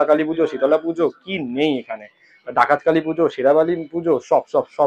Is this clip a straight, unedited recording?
yes; 0 cuts

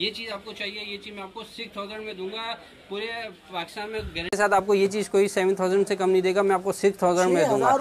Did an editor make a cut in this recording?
no; 0 cuts

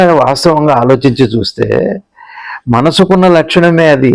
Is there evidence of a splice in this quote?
no; 0 cuts

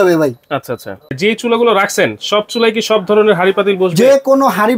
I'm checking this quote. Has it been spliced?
yes; 1 cut; at 1.2 s

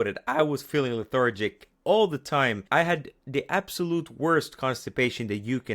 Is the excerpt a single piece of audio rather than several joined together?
no; 1 cut; at 2.6 s

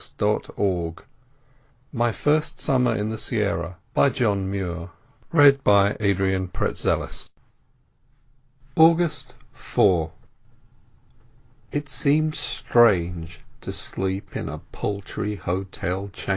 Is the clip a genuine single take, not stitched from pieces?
yes; 0 cuts

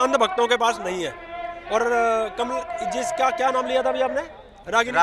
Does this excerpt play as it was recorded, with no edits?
yes; 0 cuts

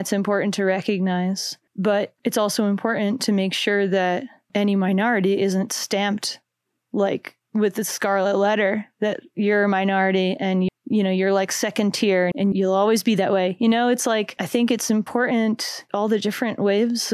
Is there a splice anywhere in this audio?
no; 0 cuts

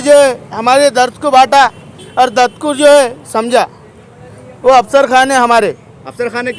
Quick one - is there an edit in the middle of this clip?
no; 0 cuts

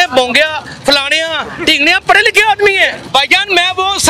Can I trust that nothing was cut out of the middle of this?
no; 1 cut; at 3.0 s

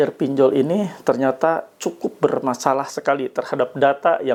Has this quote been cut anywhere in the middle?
no; 0 cuts

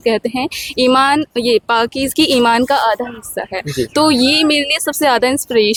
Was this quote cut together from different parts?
no; 0 cuts

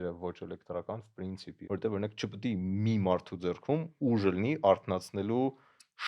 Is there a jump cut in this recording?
yes; 1 cut; at 1.5 s

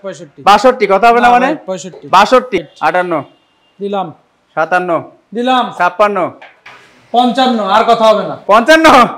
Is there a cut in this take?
yes; 1 cut; at 2.6 s

